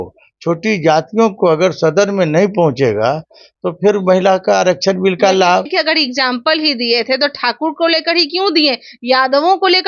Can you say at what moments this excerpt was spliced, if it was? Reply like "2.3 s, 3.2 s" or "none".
5.7 s

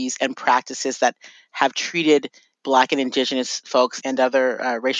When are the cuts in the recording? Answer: 2.5 s

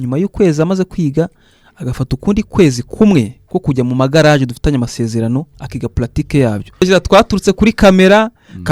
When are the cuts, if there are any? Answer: 6.8 s

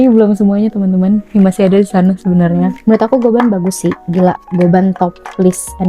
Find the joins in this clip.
2.8 s

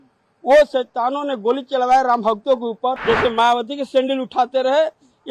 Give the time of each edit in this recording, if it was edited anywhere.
3.0 s

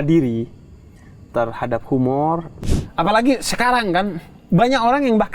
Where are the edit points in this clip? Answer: 2.5 s

